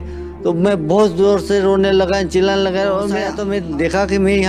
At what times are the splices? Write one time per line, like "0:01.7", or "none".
0:03.3